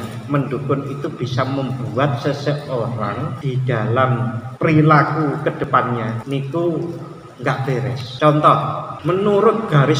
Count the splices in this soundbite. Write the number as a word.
five